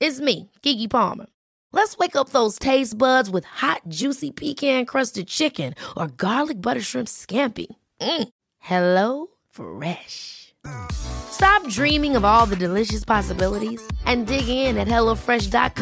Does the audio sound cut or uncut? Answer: uncut